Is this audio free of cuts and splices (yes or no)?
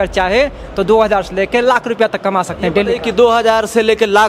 yes